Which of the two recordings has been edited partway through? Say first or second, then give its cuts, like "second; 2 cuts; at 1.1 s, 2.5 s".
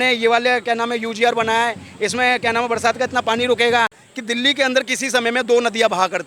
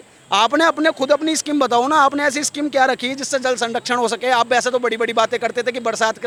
first; 1 cut; at 4.1 s